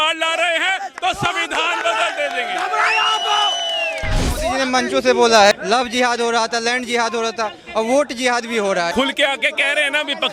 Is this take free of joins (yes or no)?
no